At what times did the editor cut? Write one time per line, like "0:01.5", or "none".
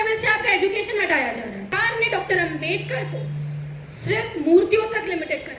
0:01.7

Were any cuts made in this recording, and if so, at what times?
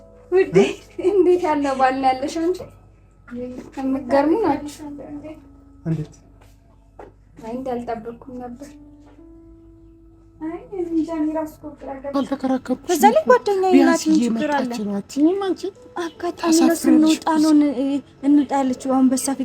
0:12.1

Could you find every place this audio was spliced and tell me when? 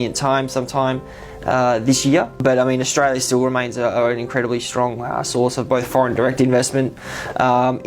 0:02.4

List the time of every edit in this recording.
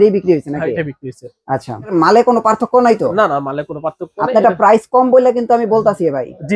0:01.9

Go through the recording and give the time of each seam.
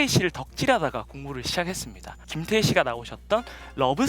0:02.3

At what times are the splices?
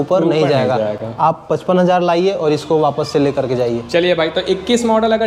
none

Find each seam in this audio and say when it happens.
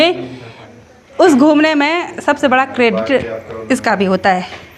none

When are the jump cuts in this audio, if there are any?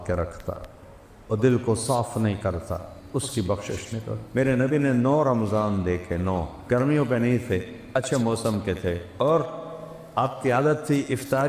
0:04.2
0:06.5
0:09.1

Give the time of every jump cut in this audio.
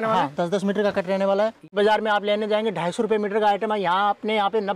0:01.7

